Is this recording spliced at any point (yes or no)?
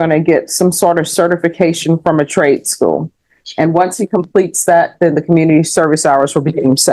no